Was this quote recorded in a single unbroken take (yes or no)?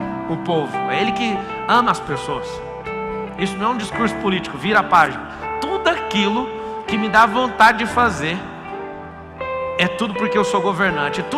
yes